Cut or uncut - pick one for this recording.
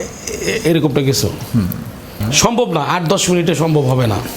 cut